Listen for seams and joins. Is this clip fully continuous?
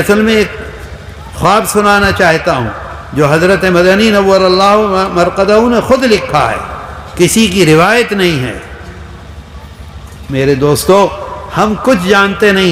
yes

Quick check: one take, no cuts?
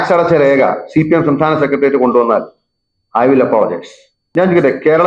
no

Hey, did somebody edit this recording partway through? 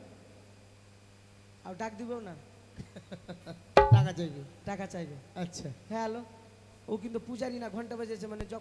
no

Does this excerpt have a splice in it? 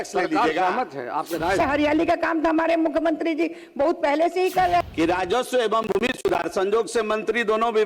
yes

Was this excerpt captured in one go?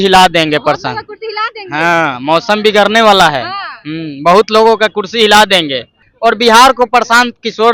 no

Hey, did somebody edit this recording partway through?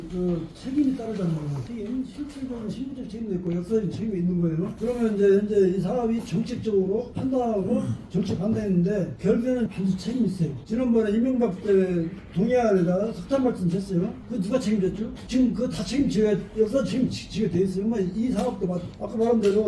no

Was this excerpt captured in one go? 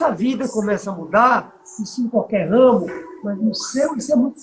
yes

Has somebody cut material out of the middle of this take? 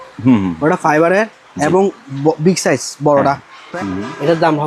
yes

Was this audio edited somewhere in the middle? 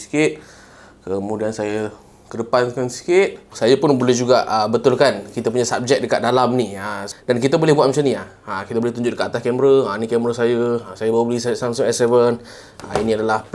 yes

